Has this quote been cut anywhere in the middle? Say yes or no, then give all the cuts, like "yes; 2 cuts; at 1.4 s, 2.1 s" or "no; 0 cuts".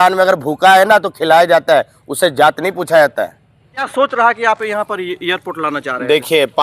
yes; 1 cut; at 3.9 s